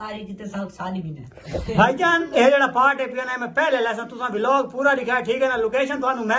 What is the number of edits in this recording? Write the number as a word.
zero